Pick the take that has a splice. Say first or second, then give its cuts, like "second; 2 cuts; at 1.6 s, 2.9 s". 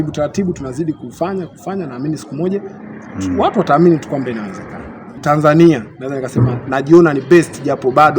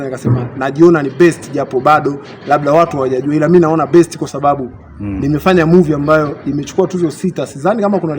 first; 1 cut; at 5.2 s